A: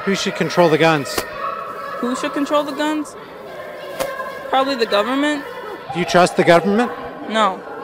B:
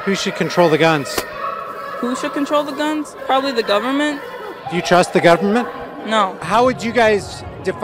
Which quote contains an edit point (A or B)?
B